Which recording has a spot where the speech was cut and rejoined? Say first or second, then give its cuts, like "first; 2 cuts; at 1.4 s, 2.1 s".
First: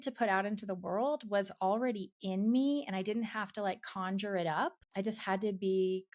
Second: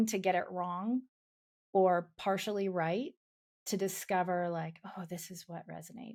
first; 1 cut; at 4.8 s